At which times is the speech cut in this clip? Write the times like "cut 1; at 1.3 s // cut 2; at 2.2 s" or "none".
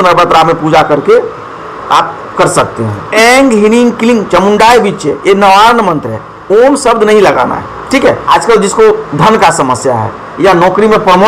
cut 1; at 2.9 s // cut 2; at 8.2 s